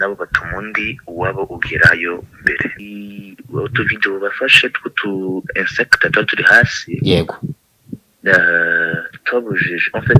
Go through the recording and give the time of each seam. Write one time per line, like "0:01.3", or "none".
0:02.8